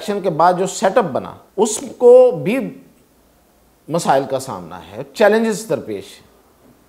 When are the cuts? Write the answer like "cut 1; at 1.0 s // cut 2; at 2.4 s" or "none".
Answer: cut 1; at 1.4 s